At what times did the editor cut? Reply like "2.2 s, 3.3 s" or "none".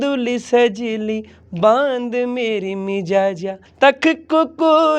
3.6 s